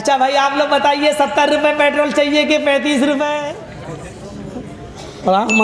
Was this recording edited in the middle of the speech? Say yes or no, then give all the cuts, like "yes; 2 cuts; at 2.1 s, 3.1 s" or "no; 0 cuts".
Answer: yes; 1 cut; at 3.4 s